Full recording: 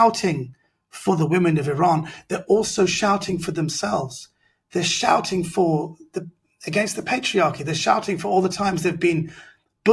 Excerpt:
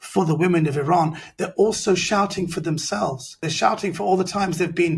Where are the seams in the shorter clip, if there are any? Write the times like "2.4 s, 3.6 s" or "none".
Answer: 3.4 s